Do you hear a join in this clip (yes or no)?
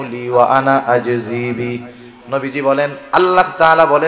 no